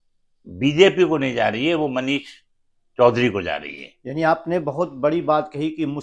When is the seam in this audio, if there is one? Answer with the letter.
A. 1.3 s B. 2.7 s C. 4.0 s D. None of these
D